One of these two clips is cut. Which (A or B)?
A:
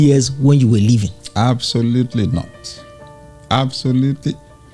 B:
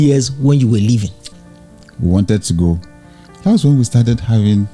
B